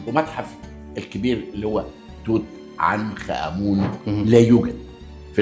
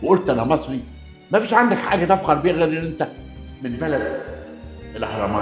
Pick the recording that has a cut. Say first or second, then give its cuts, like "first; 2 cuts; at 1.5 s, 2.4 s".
first; 1 cut; at 4.0 s